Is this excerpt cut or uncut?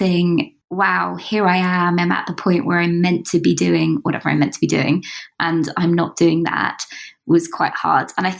uncut